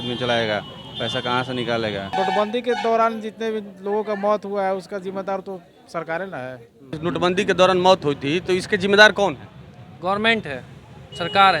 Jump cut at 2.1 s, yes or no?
yes